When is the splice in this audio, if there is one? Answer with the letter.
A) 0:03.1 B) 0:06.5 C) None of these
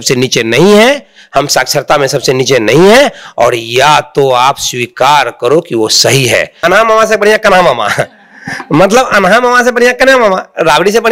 B